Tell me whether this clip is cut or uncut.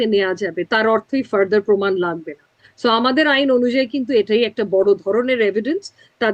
uncut